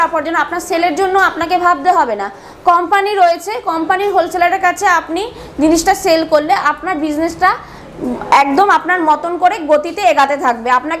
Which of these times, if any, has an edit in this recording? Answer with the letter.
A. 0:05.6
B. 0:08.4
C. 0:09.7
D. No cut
D